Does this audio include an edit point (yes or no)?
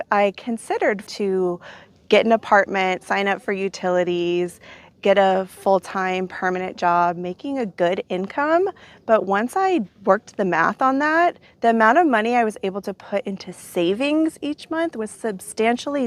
yes